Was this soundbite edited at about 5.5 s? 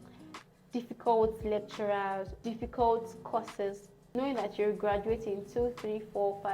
no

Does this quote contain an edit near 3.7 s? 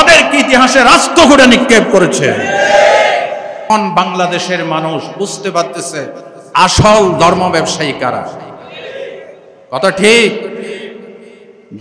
yes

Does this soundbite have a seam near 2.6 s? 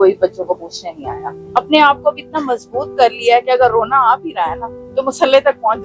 no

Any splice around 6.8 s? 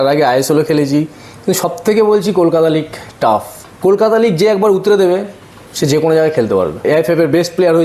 yes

